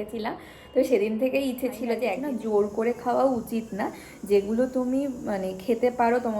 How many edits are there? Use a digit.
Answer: 1